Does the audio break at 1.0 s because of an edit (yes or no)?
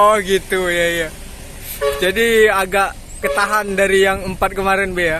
no